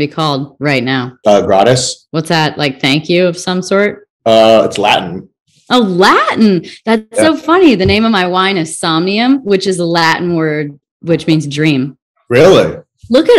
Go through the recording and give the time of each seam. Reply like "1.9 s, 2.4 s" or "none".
1.1 s, 2.0 s, 4.1 s